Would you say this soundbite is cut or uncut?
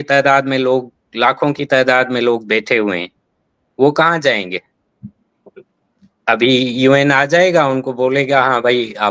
uncut